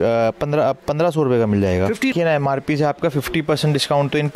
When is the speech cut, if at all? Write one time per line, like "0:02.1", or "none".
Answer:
0:02.1